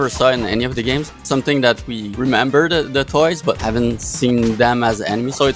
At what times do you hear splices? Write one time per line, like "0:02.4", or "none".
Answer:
0:01.2
0:02.0
0:03.6